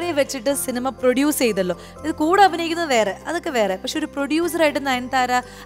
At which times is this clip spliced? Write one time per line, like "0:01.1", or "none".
none